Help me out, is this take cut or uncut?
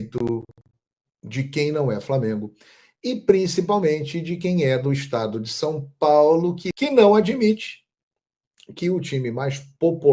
cut